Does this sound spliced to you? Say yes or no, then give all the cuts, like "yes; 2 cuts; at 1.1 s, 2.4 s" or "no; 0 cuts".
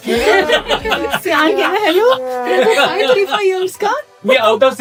no; 0 cuts